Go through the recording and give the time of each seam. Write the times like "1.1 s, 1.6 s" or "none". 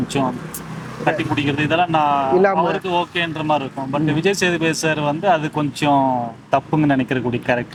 none